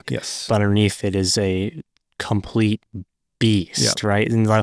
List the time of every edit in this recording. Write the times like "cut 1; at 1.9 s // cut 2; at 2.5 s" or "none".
none